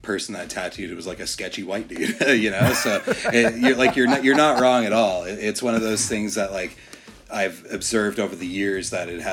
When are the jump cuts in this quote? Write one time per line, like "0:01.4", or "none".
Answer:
none